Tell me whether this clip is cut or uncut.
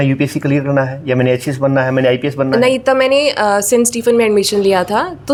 uncut